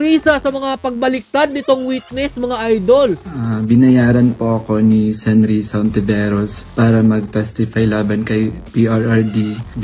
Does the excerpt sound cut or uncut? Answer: cut